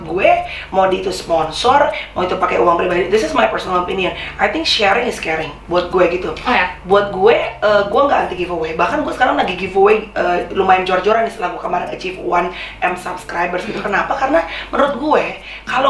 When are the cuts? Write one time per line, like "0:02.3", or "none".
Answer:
none